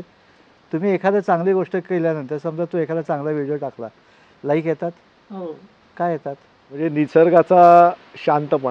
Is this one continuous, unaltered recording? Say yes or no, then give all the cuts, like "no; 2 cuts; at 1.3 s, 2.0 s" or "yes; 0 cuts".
no; 1 cut; at 6.9 s